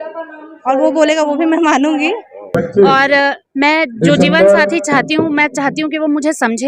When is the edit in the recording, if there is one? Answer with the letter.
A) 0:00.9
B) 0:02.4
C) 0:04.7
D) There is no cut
B